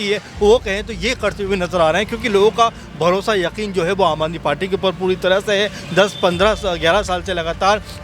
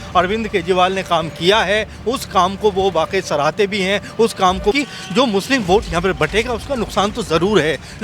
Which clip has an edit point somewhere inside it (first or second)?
second